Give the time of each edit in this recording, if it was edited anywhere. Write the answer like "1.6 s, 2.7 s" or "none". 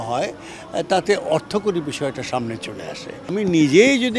3.2 s

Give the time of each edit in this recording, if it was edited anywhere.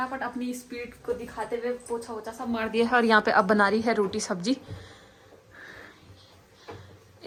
none

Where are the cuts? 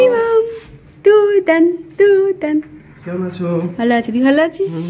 none

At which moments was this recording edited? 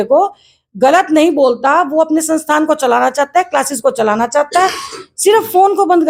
none

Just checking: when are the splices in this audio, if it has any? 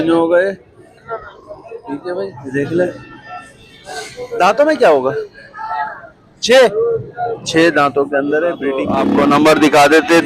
2.3 s, 8.7 s

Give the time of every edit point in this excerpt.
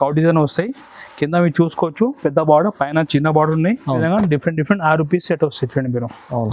4.0 s

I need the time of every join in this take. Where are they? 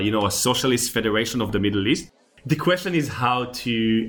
2.1 s

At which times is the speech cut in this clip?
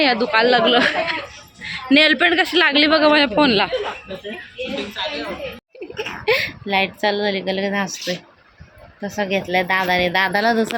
5.6 s

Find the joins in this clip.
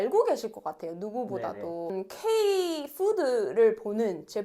1.9 s

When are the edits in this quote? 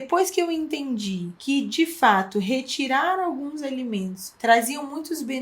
1.3 s, 4.2 s

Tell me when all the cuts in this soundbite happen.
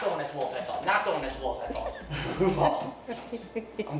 2.1 s

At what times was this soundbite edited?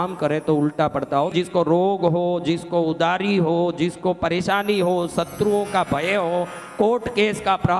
1.3 s

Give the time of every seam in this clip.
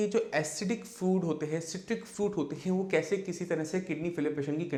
none

